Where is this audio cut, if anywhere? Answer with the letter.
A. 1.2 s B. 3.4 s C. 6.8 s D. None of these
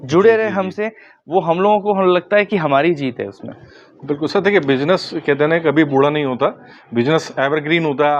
D